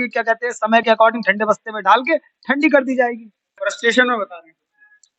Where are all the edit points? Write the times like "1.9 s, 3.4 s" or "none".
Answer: 3.5 s